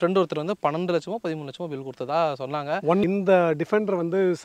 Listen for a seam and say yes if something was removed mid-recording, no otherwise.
yes